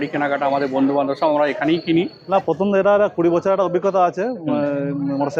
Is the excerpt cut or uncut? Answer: cut